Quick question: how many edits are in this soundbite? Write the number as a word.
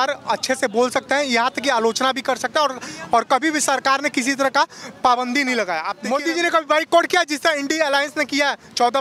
one